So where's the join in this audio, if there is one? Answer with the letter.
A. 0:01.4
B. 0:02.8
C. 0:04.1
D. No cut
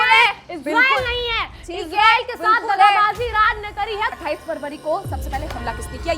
C